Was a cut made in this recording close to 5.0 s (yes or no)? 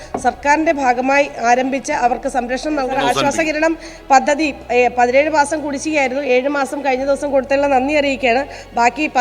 no